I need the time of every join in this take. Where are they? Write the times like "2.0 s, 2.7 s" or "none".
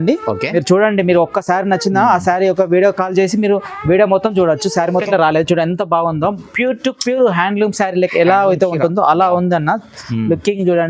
5.1 s